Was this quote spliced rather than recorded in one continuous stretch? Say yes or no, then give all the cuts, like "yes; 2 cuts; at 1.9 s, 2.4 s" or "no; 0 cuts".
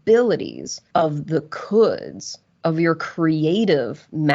no; 0 cuts